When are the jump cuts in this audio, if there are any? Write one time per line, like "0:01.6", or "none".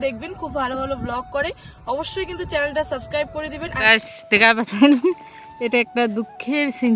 0:03.8